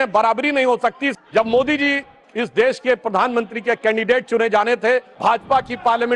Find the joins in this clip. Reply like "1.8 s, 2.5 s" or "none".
1.1 s, 5.1 s

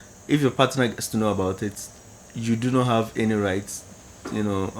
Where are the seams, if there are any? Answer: none

